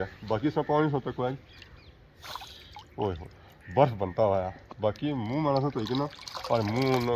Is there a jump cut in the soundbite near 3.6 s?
no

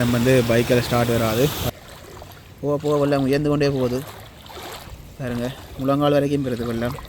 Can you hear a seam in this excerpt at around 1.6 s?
yes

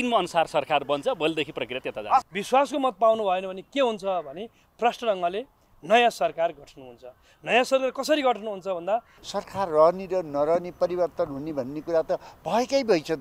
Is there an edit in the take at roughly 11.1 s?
no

